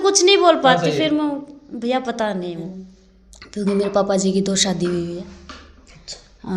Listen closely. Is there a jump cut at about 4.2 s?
no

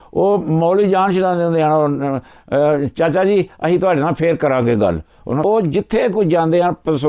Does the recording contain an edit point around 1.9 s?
no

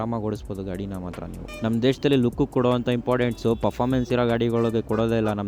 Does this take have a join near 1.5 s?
yes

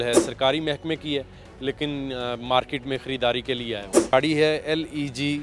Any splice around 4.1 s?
yes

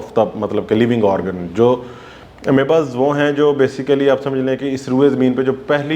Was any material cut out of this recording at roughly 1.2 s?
no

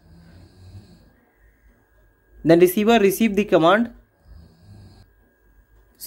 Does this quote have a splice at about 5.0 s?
yes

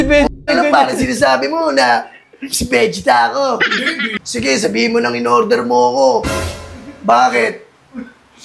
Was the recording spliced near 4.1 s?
yes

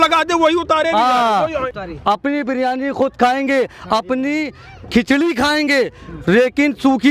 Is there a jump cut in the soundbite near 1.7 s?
yes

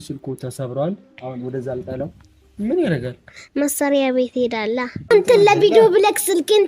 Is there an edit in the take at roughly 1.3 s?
no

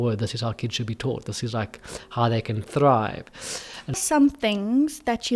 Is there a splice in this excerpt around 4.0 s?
yes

